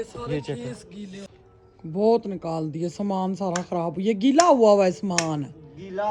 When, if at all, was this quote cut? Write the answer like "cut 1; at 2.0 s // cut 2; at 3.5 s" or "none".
cut 1; at 1.2 s